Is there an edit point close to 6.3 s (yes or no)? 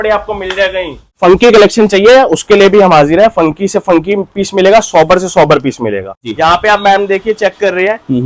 yes